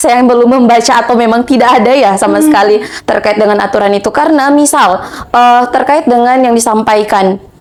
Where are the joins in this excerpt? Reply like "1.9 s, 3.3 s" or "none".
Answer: none